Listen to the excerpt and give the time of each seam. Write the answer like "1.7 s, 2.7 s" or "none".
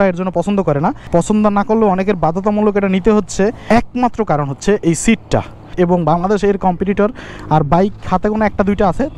1.0 s, 3.6 s, 5.6 s